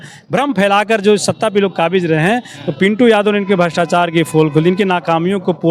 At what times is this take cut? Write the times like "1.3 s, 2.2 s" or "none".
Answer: none